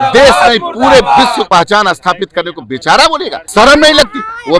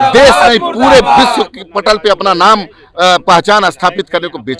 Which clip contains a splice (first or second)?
first